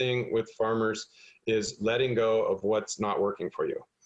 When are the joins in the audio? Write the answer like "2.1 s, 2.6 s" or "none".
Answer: none